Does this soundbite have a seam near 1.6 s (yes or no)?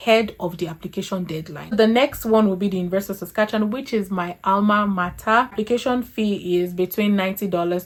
no